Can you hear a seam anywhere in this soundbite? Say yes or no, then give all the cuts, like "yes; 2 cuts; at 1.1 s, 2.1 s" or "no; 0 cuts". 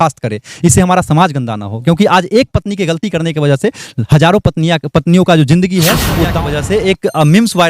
yes; 1 cut; at 6.4 s